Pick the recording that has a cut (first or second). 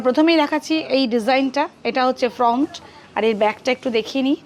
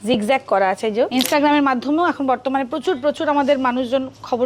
second